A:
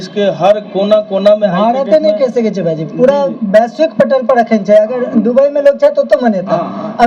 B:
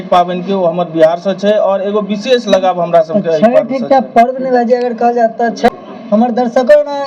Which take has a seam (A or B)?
B